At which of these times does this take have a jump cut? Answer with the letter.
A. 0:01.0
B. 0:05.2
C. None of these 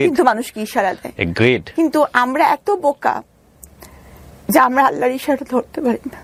C